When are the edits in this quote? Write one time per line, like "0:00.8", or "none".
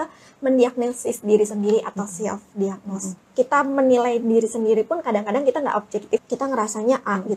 0:03.1
0:06.2